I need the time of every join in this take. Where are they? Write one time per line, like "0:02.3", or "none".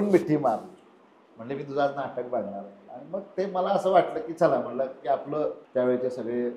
0:05.6